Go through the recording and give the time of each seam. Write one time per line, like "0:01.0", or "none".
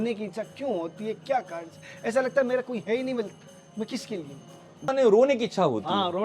0:04.9